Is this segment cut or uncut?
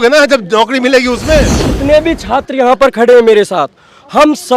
cut